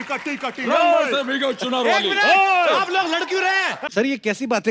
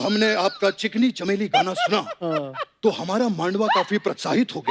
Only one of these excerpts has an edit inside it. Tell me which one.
first; 1 cut; at 3.8 s

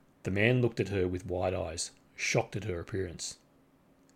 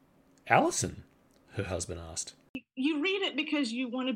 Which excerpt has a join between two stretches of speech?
second; 1 cut; at 2.7 s

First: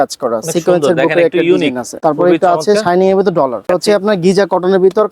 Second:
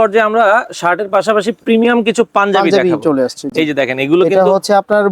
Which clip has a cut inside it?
first; 2 cuts; at 1.9 s, 3.6 s

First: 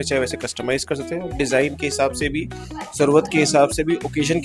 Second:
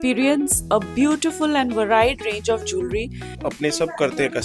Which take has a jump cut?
second; 1 cut; at 3.4 s

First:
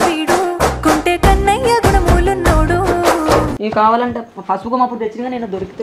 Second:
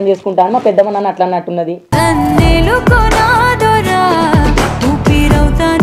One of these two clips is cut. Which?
first; 1 cut; at 3.6 s

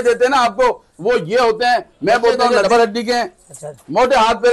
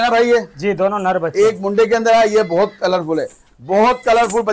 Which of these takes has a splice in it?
first; 1 cut; at 2.5 s

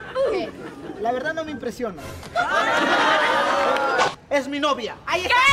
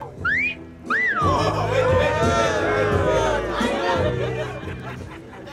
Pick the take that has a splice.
first; 1 cut; at 4.2 s

